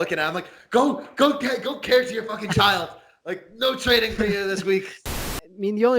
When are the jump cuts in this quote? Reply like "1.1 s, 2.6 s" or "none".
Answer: 5.0 s